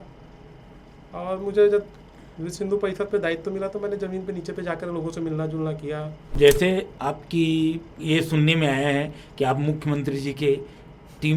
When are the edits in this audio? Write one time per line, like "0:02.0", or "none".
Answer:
0:06.2